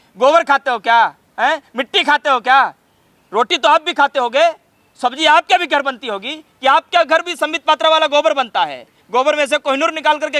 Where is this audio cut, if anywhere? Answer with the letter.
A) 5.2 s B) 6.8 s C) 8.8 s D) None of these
D